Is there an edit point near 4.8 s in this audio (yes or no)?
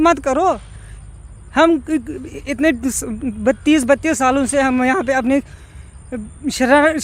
no